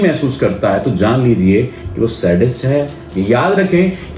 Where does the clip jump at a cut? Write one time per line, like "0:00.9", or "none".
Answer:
0:03.0